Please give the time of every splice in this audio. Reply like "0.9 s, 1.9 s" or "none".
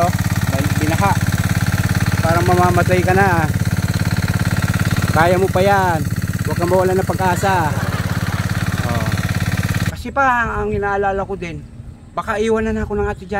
9.9 s